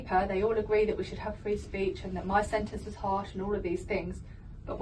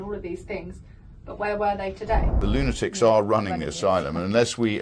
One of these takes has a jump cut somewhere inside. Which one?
second; 1 cut; at 2.4 s

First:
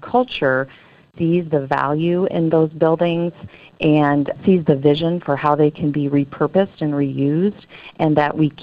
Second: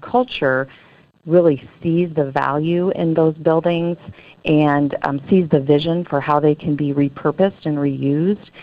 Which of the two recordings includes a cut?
first; 2 cuts; at 1.1 s, 4.4 s

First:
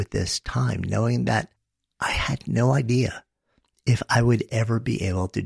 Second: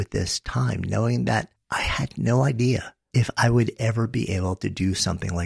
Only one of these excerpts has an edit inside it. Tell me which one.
second; 2 cuts; at 1.6 s, 3.0 s

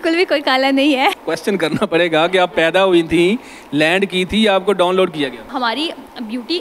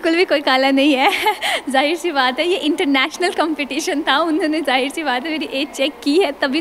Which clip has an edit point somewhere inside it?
first; 2 cuts; at 1.2 s, 5.5 s

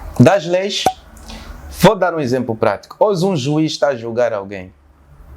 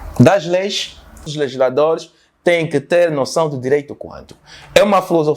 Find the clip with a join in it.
second; 1 cut; at 1.3 s

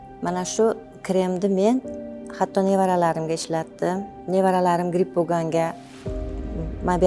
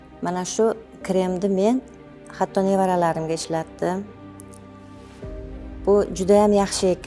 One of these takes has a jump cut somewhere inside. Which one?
first; 1 cut; at 4.1 s

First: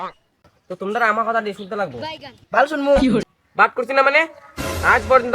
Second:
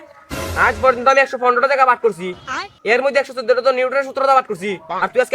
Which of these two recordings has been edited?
first; 1 cut; at 3.2 s

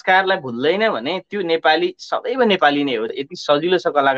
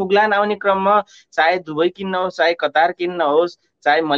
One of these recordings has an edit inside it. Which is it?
first; 1 cut; at 3.1 s

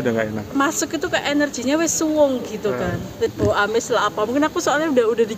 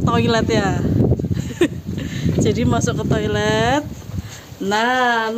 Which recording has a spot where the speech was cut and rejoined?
first; 1 cut; at 3.3 s

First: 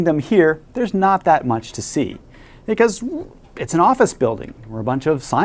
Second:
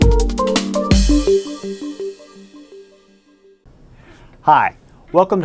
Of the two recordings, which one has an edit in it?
first; 1 cut; at 3.0 s

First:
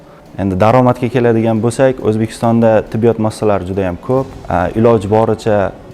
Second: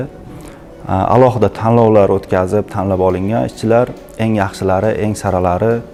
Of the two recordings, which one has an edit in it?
first; 1 cut; at 4.4 s

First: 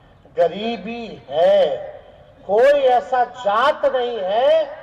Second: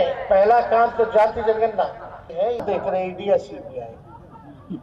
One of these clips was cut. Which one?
second; 1 cut; at 2.6 s

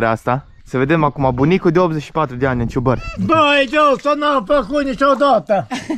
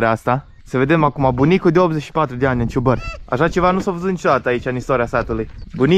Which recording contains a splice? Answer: first; 1 cut; at 3.1 s

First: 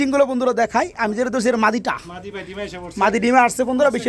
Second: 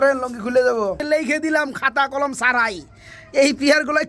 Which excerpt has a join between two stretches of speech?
second; 1 cut; at 1.0 s

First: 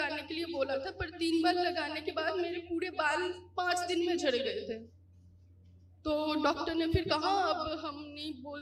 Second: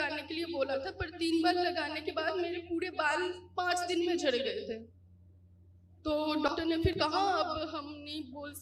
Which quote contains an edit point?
second; 1 cut; at 6.9 s

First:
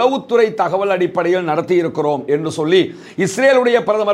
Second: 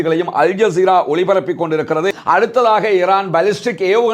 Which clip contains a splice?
second; 1 cut; at 2.1 s

